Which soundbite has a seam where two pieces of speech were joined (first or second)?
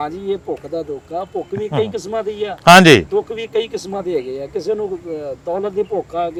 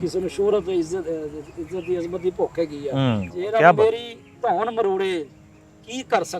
second